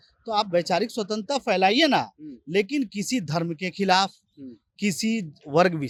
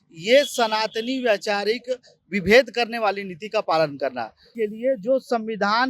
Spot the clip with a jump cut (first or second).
second